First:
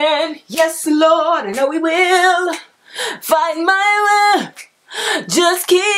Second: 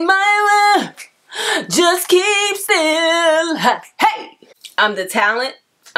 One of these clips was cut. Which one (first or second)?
second